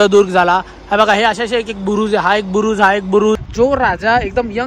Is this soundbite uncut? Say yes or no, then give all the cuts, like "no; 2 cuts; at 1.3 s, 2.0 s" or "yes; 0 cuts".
no; 1 cut; at 3.5 s